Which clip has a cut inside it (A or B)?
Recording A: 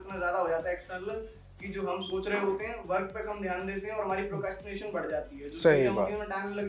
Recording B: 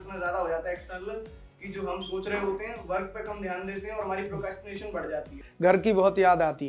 B